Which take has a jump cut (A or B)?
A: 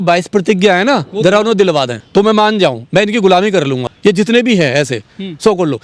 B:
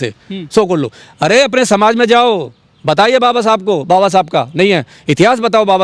A